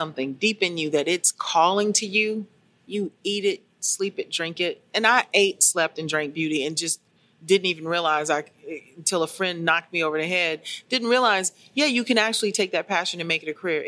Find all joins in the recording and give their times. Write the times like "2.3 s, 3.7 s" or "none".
none